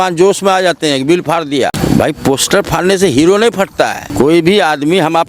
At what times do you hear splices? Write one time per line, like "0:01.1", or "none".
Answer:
0:01.7
0:04.0